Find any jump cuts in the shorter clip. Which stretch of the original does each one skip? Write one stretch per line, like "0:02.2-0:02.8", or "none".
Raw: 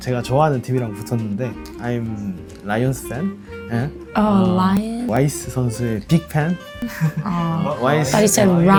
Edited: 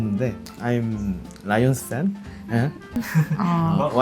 0:04.0-0:06.7